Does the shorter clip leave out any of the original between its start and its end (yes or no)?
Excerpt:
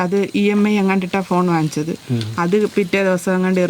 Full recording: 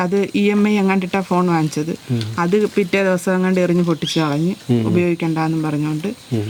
no